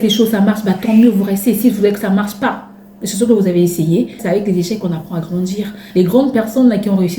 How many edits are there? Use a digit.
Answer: 2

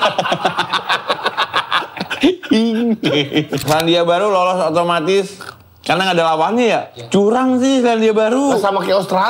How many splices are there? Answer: 1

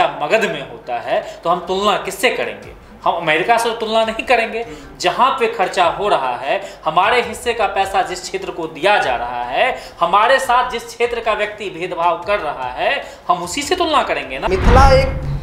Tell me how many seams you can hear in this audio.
1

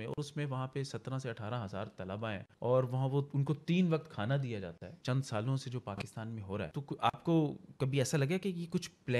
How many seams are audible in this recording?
3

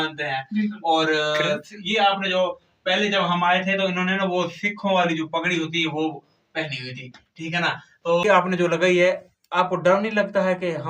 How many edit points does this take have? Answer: 1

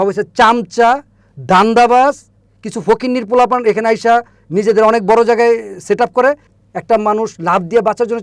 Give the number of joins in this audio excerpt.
1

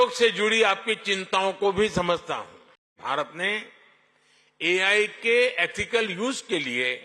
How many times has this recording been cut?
1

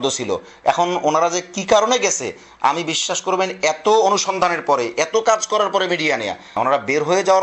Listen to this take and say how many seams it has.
1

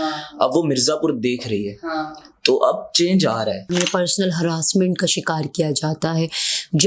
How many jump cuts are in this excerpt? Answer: 1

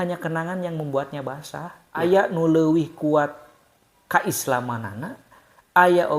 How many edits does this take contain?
1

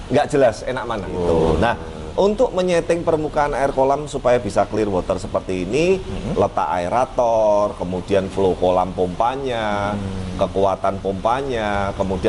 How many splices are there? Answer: 1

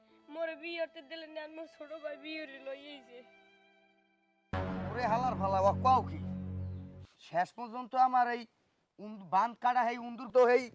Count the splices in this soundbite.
0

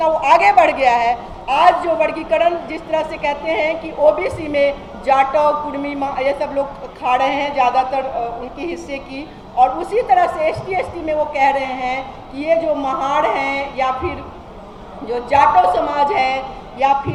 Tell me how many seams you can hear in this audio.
0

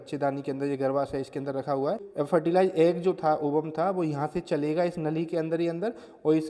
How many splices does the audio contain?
1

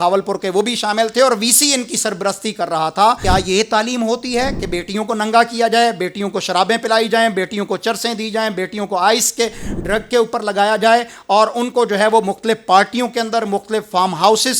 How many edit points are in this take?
1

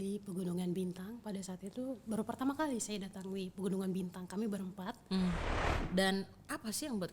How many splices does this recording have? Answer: 1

